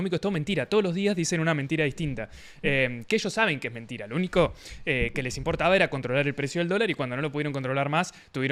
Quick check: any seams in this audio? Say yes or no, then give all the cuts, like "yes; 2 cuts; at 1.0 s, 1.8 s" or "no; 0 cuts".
no; 0 cuts